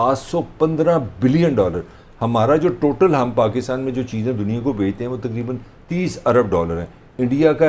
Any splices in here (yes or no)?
no